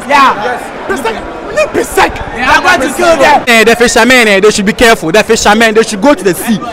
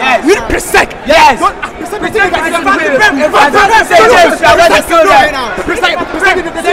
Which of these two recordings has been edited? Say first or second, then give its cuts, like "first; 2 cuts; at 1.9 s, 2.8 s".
first; 1 cut; at 3.5 s